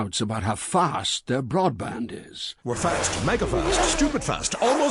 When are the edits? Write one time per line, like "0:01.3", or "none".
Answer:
none